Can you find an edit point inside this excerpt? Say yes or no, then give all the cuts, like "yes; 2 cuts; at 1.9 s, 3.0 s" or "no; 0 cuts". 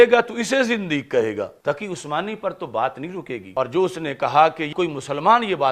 yes; 3 cuts; at 1.6 s, 3.4 s, 4.7 s